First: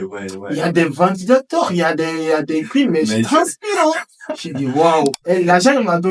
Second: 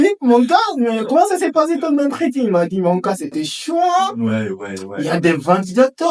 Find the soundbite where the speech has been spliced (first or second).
first